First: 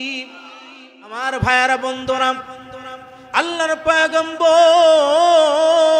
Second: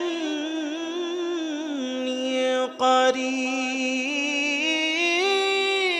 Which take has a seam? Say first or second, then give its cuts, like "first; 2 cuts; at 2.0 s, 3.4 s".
first; 1 cut; at 1.2 s